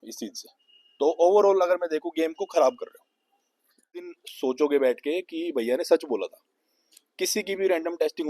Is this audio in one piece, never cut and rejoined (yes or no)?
no